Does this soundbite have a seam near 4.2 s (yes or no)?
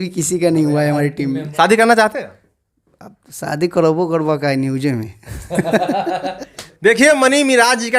no